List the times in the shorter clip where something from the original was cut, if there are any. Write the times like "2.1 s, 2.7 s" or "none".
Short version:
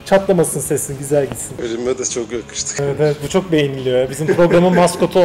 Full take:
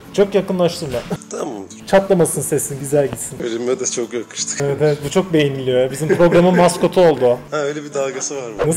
none